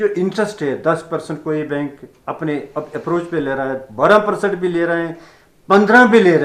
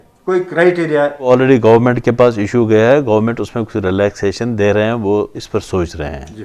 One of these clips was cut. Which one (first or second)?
second